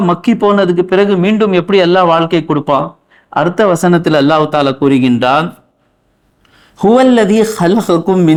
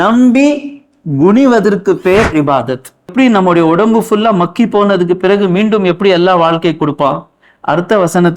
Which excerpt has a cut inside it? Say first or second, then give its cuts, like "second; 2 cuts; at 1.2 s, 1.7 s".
second; 1 cut; at 3.1 s